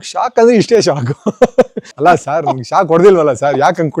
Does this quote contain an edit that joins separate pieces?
yes; 1 cut; at 1.9 s

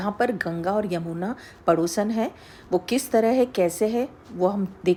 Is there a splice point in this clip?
no; 0 cuts

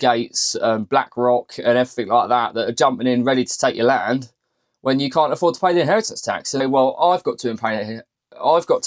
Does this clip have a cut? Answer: yes; 1 cut; at 6.6 s

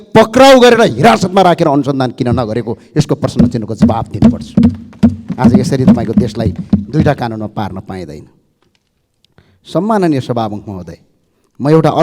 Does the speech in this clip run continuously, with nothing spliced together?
yes; 0 cuts

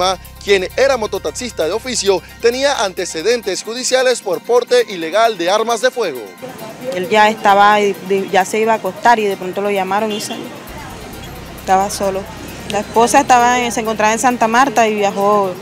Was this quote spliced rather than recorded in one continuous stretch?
yes; 1 cut; at 6.3 s

